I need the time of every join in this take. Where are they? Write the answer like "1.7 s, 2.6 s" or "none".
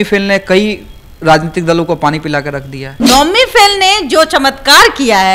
3.0 s